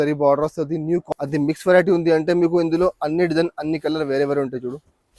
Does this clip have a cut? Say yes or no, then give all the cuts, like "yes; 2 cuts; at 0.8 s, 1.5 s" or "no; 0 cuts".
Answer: yes; 1 cut; at 1.1 s